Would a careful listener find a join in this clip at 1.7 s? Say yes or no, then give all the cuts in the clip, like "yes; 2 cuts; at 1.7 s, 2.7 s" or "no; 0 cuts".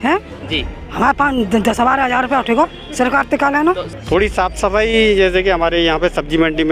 no; 1 cut; at 3.9 s